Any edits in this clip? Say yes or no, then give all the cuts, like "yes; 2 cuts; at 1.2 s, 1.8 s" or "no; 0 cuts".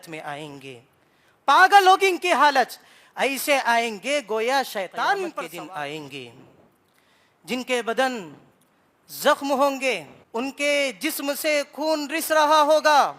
yes; 2 cuts; at 5.4 s, 10.1 s